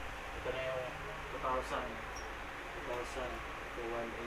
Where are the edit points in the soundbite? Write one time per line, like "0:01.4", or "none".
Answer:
none